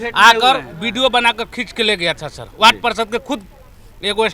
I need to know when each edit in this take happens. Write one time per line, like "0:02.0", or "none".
none